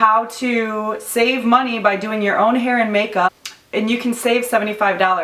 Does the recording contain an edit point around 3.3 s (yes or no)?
yes